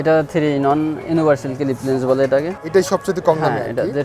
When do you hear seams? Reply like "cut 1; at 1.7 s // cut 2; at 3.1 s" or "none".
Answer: none